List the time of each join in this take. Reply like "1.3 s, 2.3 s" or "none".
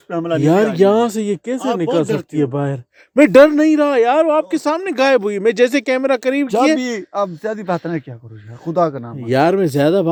none